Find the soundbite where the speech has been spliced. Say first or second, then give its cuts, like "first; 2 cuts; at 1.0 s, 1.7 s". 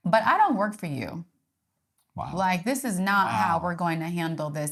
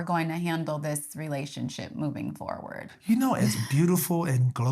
second; 1 cut; at 2.9 s